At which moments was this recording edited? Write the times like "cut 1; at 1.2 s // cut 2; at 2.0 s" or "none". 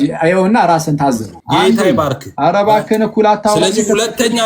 cut 1; at 1.3 s